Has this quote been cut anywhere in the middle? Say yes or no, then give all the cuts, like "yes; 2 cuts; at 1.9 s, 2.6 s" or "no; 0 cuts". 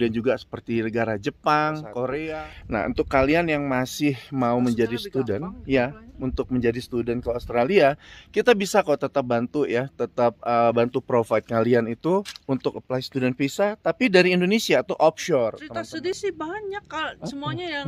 yes; 2 cuts; at 2.2 s, 16.2 s